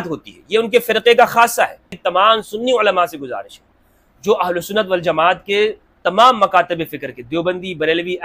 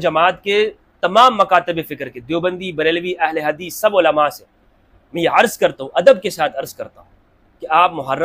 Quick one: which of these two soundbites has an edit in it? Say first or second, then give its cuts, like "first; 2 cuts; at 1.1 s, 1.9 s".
first; 1 cut; at 2.0 s